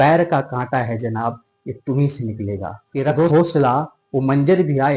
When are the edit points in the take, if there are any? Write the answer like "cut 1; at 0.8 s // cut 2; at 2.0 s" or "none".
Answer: cut 1; at 3.3 s